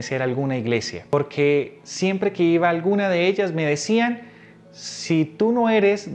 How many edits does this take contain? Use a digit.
1